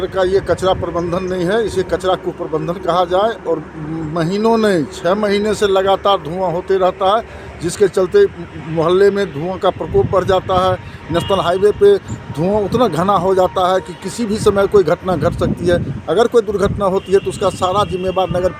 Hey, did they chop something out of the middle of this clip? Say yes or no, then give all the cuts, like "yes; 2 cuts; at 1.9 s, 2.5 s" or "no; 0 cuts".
no; 0 cuts